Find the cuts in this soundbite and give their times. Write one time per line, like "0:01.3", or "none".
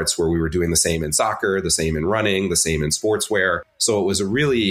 0:03.7